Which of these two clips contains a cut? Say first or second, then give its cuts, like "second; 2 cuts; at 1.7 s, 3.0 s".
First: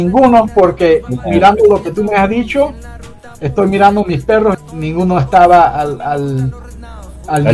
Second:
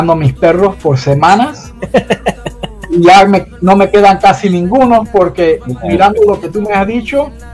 first; 1 cut; at 4.6 s